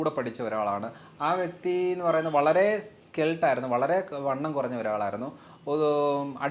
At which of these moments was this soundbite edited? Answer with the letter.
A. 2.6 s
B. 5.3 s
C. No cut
C